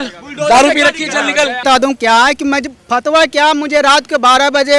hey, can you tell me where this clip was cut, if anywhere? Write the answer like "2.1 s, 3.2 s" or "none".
1.6 s